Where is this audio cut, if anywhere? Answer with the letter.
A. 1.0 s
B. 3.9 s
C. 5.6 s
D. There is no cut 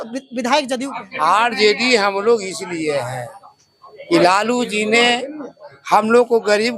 A